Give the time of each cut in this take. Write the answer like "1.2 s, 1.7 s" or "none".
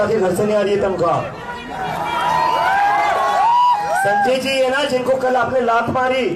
none